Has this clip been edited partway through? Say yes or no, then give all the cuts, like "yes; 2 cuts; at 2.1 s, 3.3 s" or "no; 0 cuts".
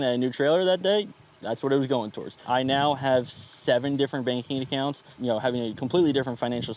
yes; 2 cuts; at 2.3 s, 5.1 s